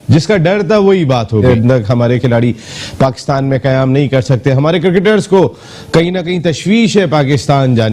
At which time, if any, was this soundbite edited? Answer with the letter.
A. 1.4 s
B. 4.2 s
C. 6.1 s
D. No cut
A